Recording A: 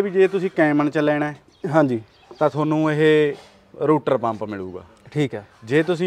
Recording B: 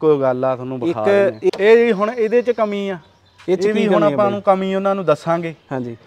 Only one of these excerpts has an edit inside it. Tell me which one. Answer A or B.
B